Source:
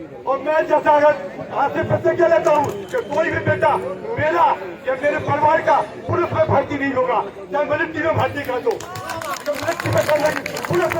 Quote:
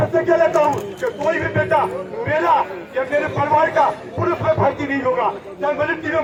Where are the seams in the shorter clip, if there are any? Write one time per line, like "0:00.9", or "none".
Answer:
none

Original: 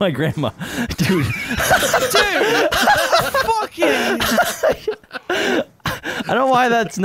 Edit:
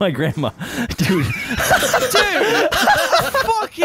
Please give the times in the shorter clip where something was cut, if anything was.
none

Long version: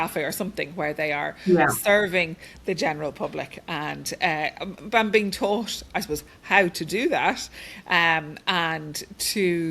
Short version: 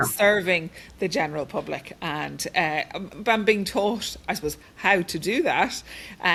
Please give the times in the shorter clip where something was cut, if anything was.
none

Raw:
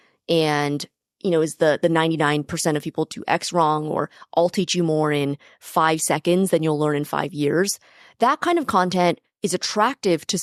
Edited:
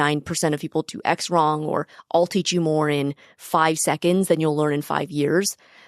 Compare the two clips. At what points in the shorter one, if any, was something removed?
none

